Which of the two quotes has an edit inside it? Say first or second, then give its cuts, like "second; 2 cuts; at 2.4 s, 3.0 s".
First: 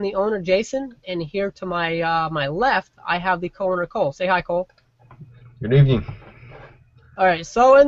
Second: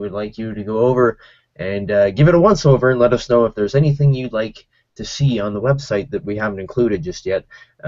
second; 1 cut; at 5.5 s